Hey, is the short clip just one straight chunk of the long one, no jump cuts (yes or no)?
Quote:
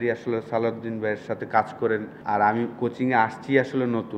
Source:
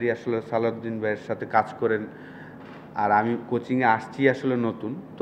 no